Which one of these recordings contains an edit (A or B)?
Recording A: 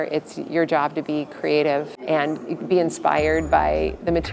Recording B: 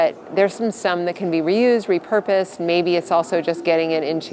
A